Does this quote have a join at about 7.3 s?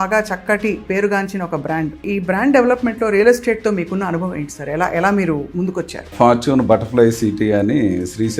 no; 2 cuts; at 2.0 s, 6.0 s

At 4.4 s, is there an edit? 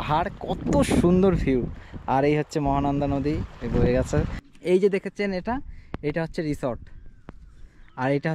yes; 1 cut; at 4.4 s

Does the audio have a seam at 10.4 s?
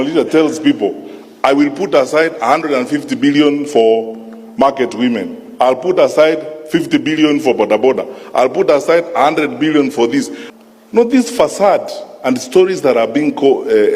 yes; 1 cut; at 10.4 s

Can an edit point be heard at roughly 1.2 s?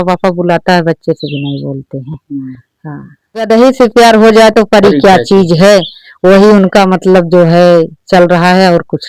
no; 1 cut; at 3.4 s

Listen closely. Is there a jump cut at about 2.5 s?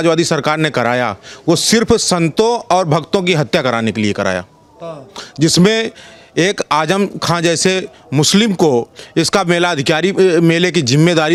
no; 0 cuts

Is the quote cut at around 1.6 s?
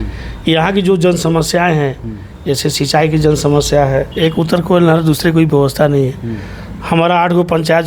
no; 1 cut; at 4.1 s

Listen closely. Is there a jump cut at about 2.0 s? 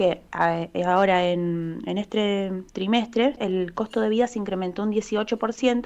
no; 1 cut; at 3.4 s

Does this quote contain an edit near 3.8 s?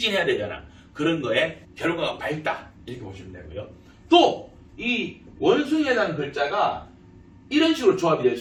no; 0 cuts

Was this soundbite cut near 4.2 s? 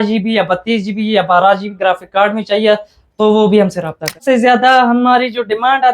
yes; 1 cut; at 4.2 s

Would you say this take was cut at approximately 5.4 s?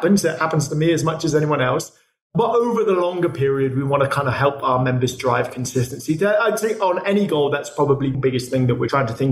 no; 1 cut; at 8.1 s

